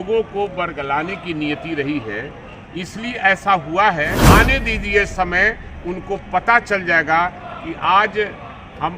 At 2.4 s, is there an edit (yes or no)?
no